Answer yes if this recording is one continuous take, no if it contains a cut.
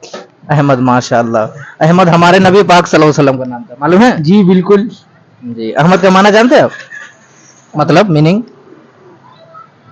yes